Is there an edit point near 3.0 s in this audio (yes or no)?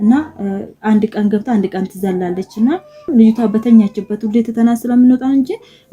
yes